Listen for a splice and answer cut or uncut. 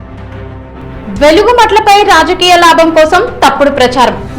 cut